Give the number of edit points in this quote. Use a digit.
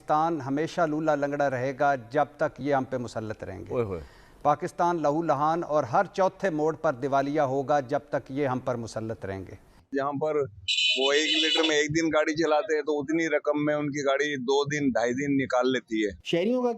1